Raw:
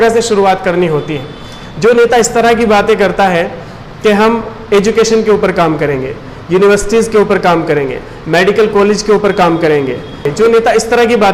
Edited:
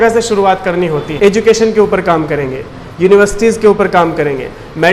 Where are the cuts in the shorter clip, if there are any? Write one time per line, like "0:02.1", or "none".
0:01.1